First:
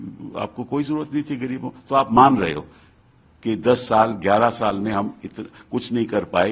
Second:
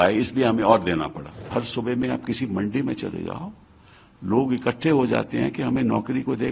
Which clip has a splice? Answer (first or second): second